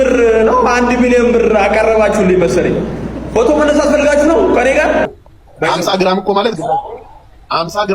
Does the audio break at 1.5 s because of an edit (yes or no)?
no